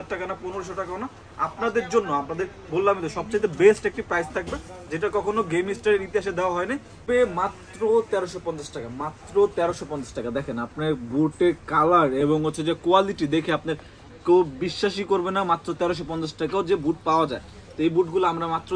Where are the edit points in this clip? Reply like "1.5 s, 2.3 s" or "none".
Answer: none